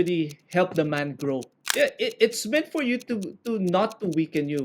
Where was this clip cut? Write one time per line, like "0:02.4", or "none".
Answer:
0:01.6